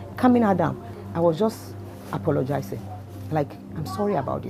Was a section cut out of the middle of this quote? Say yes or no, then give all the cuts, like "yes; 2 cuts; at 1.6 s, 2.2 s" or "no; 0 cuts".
no; 0 cuts